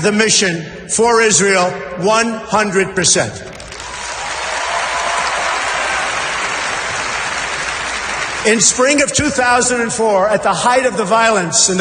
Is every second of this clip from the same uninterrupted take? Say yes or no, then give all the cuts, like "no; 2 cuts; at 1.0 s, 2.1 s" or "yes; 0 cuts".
no; 1 cut; at 4.5 s